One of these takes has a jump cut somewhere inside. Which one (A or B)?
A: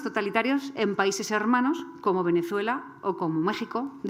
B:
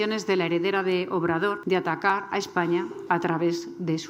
B